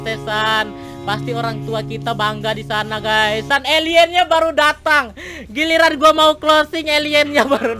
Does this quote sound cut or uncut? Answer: cut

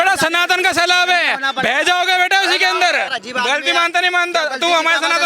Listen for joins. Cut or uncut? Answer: cut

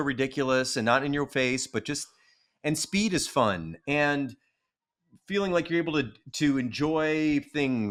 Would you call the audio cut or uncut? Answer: uncut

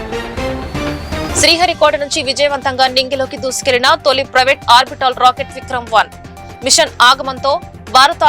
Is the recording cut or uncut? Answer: uncut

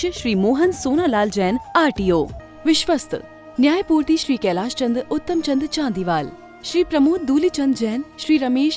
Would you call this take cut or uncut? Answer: cut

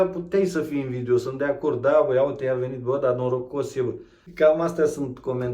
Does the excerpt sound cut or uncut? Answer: cut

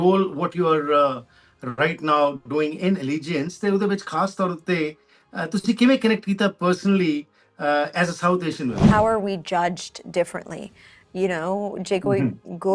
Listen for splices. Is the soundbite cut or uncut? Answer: cut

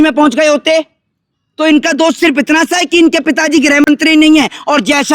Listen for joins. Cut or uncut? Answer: uncut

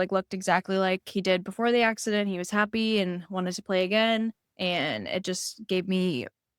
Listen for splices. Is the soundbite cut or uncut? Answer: cut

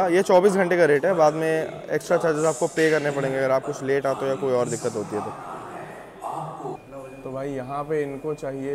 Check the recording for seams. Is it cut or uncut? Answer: uncut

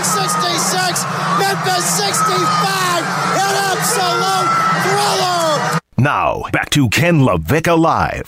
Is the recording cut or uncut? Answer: cut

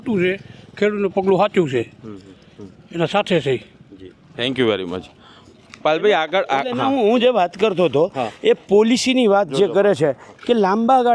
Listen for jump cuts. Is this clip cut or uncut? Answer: uncut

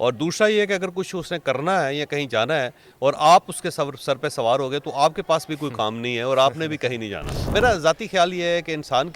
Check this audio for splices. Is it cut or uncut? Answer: cut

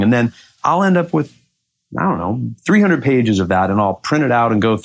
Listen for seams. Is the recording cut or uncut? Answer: uncut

